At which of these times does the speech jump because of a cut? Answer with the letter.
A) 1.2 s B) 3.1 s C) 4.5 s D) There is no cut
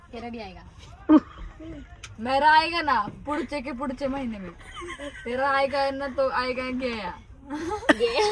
D